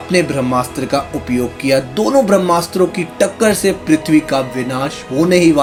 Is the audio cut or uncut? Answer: uncut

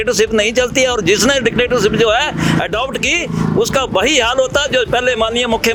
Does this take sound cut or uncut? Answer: uncut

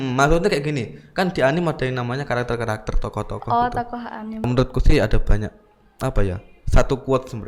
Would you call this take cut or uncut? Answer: cut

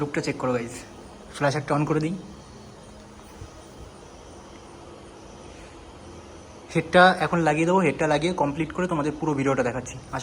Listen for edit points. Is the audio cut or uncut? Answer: uncut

